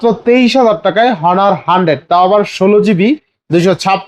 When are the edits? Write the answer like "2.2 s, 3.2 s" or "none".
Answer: none